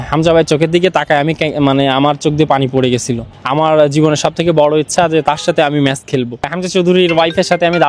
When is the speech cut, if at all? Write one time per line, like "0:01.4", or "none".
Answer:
0:03.4
0:06.6